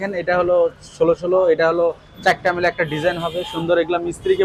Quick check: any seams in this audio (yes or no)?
no